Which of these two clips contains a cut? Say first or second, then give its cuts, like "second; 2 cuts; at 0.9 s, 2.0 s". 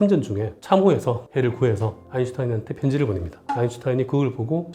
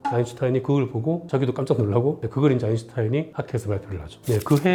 first; 1 cut; at 1.3 s